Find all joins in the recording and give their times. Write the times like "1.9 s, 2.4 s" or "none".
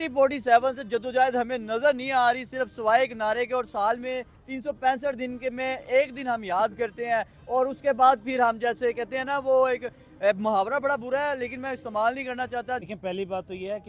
12.8 s